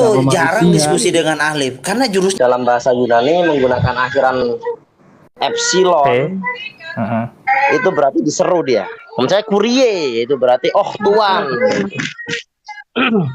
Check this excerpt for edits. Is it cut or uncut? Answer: cut